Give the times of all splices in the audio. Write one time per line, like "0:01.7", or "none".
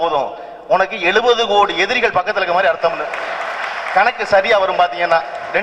none